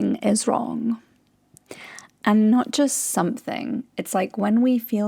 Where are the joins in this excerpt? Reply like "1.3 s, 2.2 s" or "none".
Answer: none